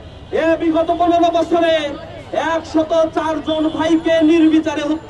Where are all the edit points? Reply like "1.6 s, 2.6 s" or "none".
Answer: none